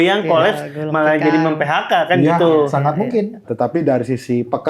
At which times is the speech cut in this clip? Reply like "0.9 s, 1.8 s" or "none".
3.4 s

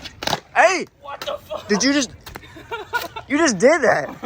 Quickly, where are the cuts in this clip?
none

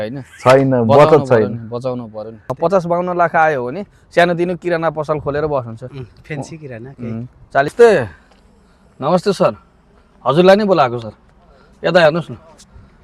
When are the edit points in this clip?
2.0 s, 7.7 s

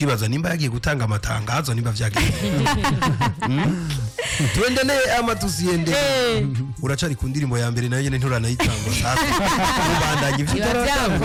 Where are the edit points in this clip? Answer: none

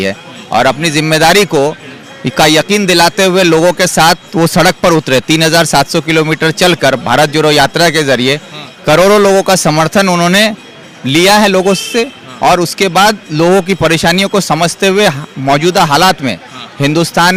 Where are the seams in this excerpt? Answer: none

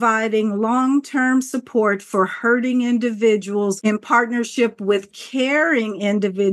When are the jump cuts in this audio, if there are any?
3.8 s

